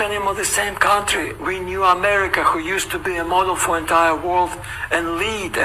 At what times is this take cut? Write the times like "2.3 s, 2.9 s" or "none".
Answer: none